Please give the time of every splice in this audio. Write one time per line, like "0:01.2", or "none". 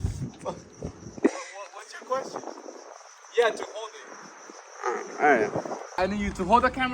0:06.0